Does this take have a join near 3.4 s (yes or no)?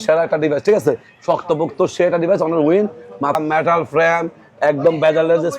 yes